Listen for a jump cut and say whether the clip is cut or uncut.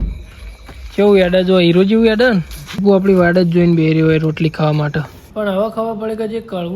cut